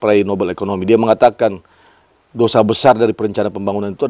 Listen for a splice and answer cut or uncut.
uncut